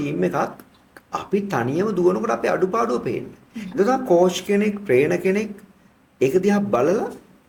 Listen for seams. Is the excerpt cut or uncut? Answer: uncut